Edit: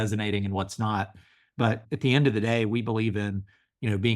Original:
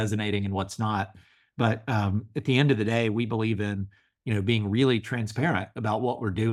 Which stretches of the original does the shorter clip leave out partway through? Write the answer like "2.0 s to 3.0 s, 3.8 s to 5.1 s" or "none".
1.8 s to 2.3 s